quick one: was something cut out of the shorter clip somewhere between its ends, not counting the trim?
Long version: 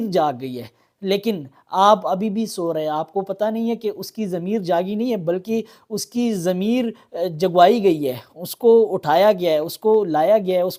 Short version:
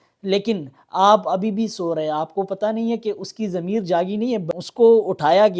yes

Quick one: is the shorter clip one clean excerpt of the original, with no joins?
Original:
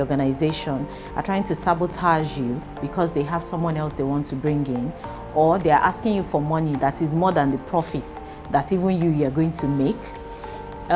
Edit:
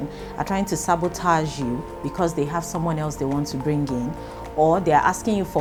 yes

